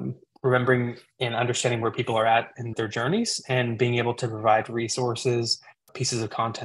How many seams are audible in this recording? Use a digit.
1